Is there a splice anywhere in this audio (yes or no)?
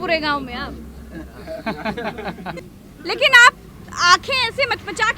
yes